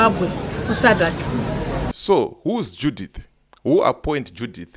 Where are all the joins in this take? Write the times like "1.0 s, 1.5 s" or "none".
1.9 s